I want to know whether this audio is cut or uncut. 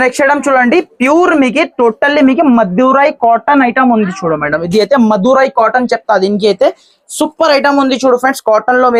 uncut